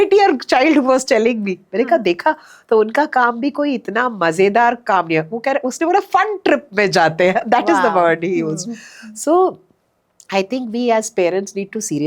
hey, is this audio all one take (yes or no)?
yes